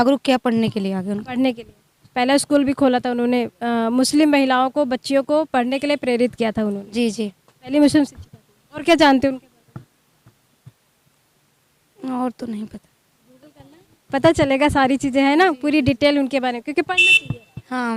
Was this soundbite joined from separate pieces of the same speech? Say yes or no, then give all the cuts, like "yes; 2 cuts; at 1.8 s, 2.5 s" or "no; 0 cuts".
no; 0 cuts